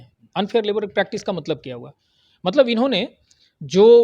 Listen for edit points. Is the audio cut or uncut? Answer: uncut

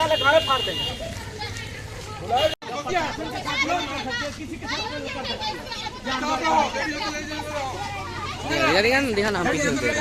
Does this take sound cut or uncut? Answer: uncut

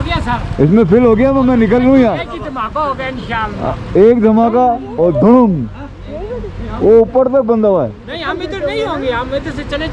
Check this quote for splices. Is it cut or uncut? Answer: uncut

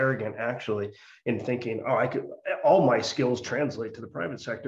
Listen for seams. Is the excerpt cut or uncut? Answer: uncut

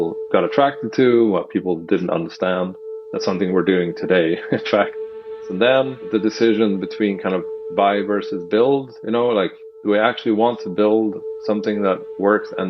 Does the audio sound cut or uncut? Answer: cut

